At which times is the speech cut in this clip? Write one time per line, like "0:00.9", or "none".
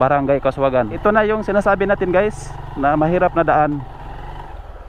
0:01.0
0:04.0